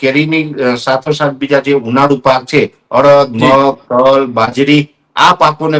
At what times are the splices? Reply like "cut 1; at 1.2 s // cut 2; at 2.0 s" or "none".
none